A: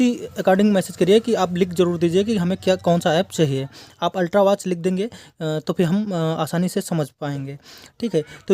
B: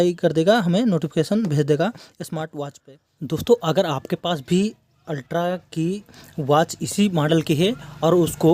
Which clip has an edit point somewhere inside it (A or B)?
B